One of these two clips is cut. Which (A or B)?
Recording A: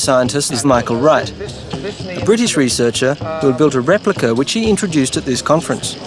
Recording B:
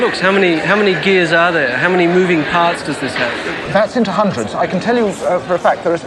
A